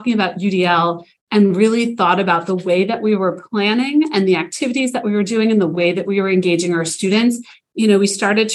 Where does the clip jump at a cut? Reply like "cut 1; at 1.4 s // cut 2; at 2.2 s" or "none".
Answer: cut 1; at 1.1 s // cut 2; at 7.5 s